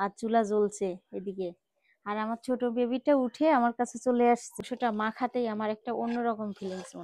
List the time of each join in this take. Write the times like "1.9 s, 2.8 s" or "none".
4.5 s